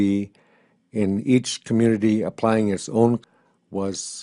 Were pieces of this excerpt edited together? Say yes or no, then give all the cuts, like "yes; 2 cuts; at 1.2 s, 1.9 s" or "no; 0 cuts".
no; 0 cuts